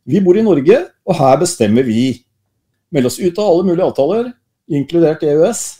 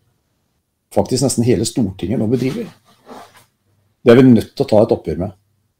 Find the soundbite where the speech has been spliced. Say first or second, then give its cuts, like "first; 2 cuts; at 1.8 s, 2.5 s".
first; 1 cut; at 2.7 s